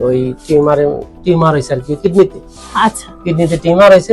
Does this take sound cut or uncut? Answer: uncut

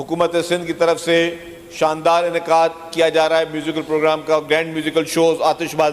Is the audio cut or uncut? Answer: uncut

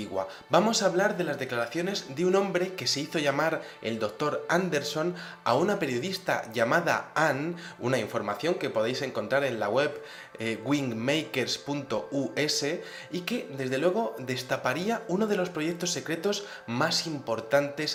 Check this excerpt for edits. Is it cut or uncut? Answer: uncut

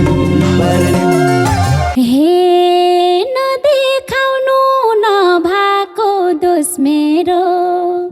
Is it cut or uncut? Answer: cut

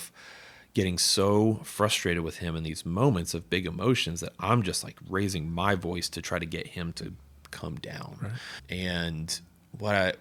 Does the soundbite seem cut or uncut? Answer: uncut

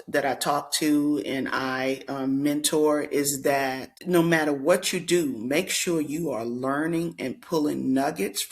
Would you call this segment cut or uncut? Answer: cut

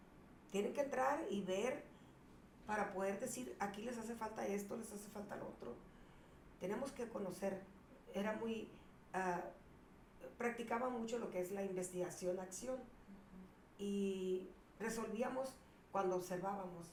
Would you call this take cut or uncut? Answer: uncut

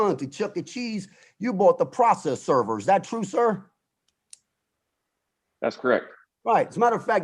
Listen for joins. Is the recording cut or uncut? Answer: uncut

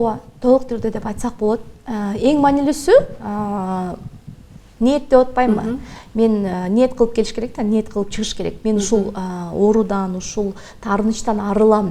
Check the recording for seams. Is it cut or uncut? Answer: uncut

